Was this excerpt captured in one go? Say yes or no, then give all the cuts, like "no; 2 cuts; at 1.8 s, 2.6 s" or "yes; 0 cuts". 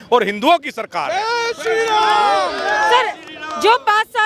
yes; 0 cuts